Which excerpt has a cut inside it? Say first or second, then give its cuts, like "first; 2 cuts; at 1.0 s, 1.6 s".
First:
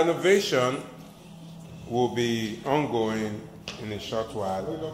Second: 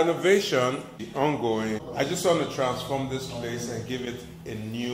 second; 2 cuts; at 1.0 s, 1.9 s